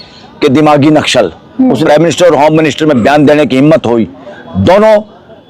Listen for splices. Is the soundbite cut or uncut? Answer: cut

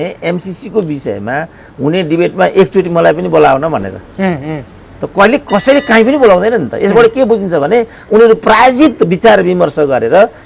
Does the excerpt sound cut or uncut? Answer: uncut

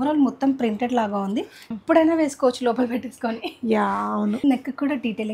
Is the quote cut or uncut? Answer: cut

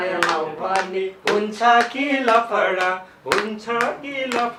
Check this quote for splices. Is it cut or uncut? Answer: uncut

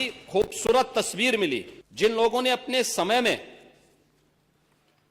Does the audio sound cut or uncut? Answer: cut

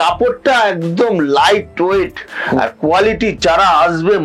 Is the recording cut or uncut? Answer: uncut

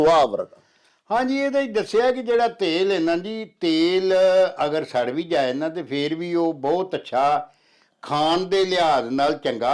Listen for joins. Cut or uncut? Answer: uncut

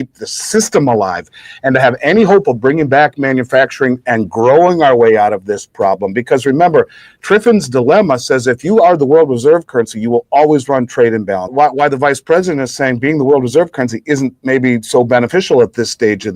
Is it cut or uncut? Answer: cut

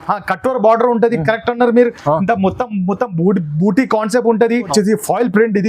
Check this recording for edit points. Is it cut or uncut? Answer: cut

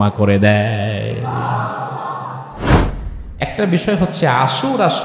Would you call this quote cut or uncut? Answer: cut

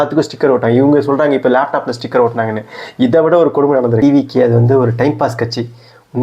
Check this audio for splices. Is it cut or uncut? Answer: cut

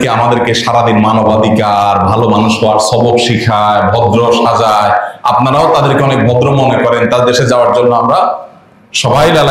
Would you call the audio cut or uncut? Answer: uncut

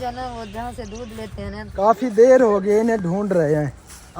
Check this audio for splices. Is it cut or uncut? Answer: cut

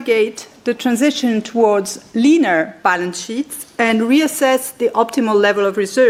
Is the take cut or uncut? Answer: uncut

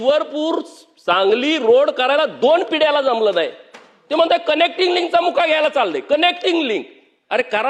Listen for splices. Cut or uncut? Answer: uncut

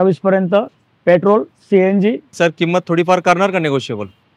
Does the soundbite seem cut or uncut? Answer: cut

